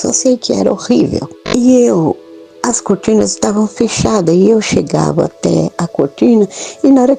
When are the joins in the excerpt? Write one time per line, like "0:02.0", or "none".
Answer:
0:01.3